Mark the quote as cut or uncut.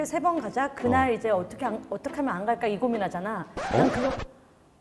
uncut